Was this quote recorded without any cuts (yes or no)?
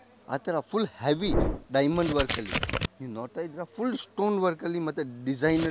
yes